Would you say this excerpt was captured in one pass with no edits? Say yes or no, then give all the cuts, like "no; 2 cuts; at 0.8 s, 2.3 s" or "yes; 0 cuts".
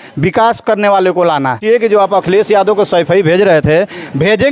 no; 1 cut; at 1.6 s